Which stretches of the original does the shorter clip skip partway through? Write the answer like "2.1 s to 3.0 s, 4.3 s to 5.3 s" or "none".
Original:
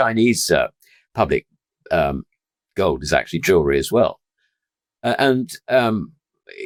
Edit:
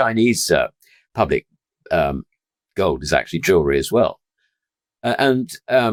none